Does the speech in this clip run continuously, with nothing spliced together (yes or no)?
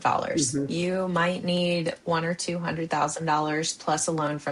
yes